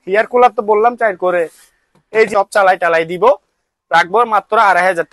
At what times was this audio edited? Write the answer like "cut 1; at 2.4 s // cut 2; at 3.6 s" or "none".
cut 1; at 2.3 s